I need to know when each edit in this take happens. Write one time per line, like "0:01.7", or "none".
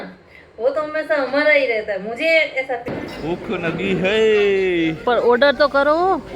0:02.9